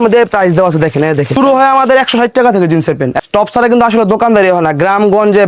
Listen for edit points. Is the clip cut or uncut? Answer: cut